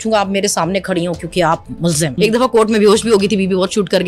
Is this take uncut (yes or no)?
no